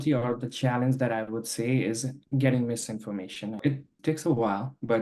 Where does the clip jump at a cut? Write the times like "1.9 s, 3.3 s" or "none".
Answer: 3.6 s